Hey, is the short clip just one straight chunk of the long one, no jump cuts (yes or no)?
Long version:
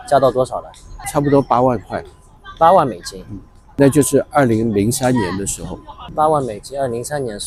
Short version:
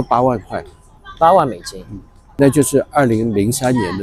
yes